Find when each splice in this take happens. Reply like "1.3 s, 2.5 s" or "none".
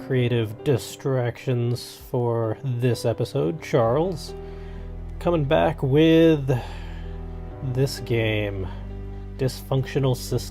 7.6 s